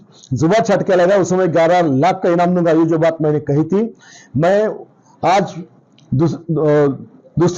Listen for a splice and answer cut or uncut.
uncut